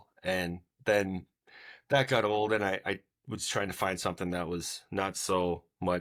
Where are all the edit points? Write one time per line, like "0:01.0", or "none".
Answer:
none